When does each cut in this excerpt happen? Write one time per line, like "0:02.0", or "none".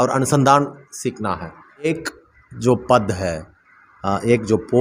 0:01.9